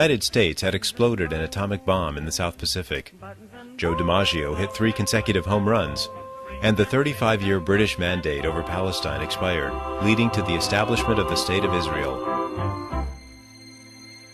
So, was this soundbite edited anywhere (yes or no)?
no